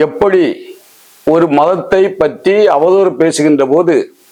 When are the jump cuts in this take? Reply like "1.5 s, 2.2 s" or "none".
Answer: none